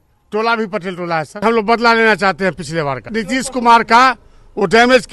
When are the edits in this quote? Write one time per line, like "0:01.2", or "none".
0:01.4
0:03.1